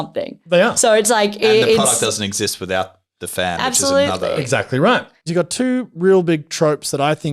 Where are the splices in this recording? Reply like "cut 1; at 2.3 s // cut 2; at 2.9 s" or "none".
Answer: cut 1; at 5.3 s